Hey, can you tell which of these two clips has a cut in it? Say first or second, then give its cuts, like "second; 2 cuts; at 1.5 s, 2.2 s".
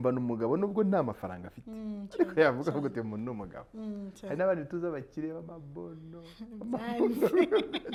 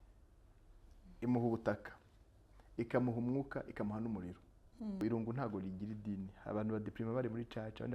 second; 1 cut; at 5.0 s